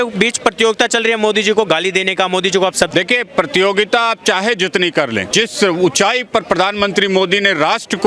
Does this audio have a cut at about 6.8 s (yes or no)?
no